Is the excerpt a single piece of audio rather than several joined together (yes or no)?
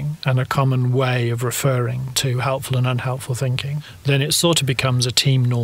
no